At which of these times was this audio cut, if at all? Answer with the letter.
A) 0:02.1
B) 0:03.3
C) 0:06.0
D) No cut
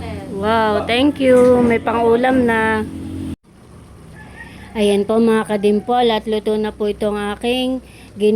B